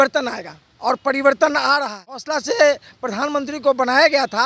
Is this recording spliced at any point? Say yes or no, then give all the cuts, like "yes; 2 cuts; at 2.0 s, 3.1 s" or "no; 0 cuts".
yes; 1 cut; at 2.3 s